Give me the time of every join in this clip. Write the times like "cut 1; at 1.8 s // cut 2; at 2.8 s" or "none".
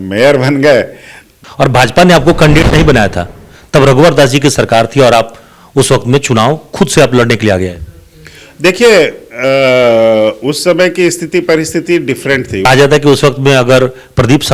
cut 1; at 1.4 s // cut 2; at 12.7 s